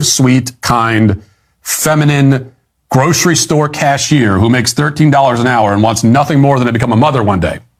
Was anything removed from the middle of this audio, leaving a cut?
no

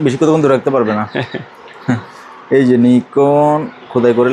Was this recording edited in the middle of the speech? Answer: no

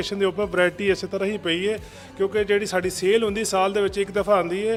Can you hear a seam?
no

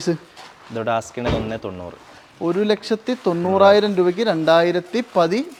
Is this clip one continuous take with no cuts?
yes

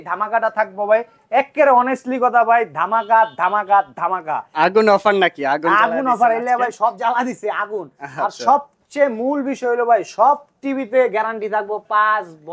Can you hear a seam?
no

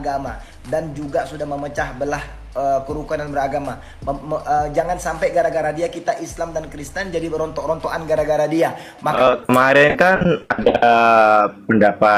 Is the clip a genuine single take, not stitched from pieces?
no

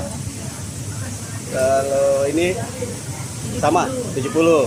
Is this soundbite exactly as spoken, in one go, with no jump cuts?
yes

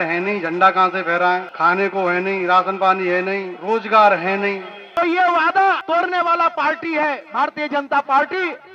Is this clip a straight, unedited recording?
no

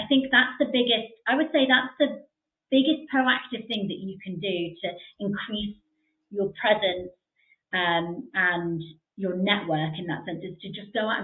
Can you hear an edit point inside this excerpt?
no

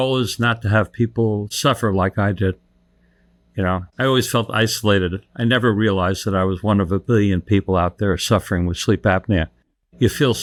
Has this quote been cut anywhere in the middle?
no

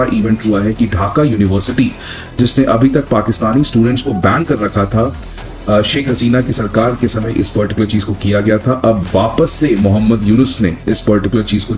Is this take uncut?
yes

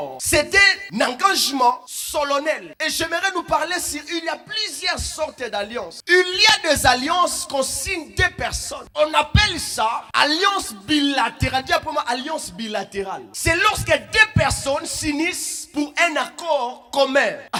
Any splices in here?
no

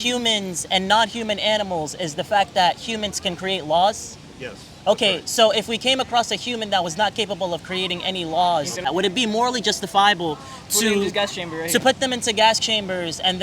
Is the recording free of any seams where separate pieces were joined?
no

